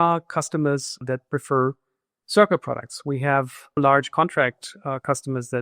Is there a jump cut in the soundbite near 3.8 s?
yes; 2 cuts; at 1.0 s, 3.8 s

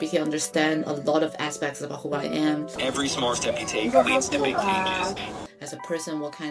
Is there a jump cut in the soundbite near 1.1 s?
no; 2 cuts; at 2.7 s, 5.5 s

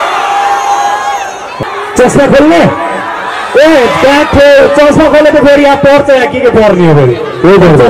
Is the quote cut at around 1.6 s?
yes; 1 cut; at 1.6 s

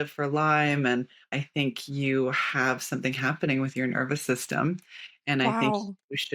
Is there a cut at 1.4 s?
yes; 1 cut; at 1.4 s

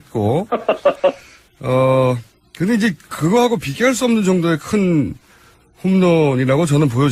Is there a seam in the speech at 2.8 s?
no; 1 cut; at 5.8 s

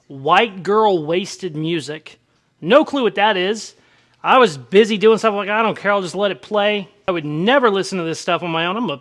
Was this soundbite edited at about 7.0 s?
yes; 1 cut; at 7.0 s

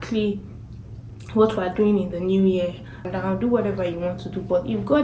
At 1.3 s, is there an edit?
no; 1 cut; at 3.0 s

